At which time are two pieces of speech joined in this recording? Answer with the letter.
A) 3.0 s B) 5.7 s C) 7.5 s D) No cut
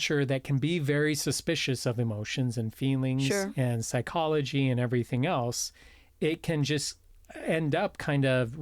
D